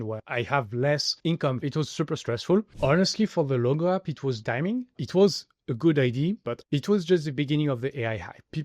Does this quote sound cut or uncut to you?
cut